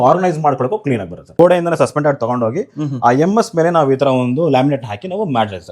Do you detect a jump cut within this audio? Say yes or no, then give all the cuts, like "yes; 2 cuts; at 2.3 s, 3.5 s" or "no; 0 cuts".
yes; 1 cut; at 1.3 s